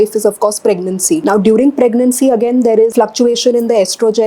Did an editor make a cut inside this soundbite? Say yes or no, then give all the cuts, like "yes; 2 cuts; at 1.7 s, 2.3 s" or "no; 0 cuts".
yes; 2 cuts; at 1.2 s, 2.9 s